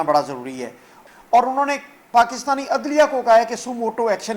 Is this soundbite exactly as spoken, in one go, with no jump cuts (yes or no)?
no